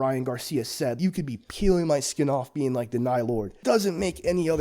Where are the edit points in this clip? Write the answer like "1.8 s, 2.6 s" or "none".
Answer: 1.0 s, 3.5 s